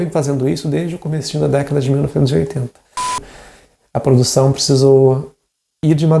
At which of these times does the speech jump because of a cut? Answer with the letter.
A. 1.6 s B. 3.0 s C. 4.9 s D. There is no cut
B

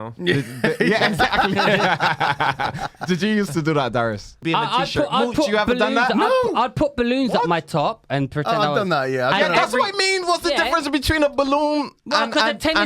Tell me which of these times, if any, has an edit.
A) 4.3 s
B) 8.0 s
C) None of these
A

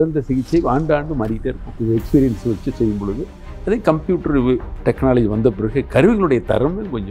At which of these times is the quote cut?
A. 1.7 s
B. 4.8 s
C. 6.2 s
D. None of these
A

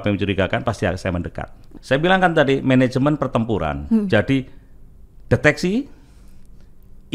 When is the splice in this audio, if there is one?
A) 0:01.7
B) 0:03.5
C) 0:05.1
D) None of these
A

